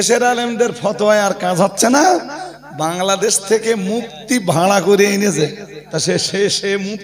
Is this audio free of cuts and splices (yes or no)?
no